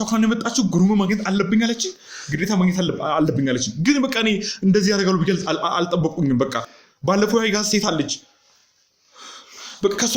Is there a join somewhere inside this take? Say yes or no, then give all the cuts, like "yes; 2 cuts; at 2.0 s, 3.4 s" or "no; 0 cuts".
no; 0 cuts